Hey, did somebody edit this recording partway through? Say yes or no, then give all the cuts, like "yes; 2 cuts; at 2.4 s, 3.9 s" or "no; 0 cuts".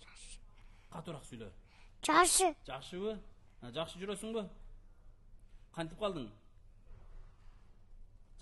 no; 0 cuts